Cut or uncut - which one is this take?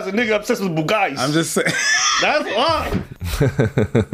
cut